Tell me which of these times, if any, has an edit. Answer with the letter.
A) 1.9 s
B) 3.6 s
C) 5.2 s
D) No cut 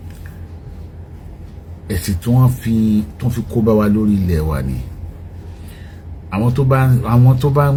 D